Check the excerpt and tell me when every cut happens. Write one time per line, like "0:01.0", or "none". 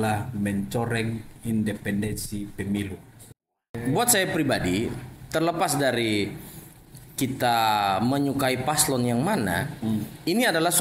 0:03.5